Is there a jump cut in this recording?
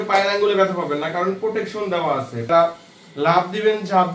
yes; 1 cut; at 2.5 s

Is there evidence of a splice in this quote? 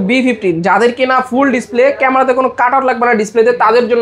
no; 0 cuts

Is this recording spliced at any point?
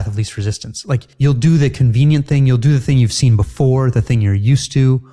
yes; 1 cut; at 1.1 s

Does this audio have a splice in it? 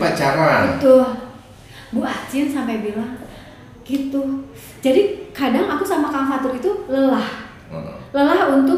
no; 0 cuts

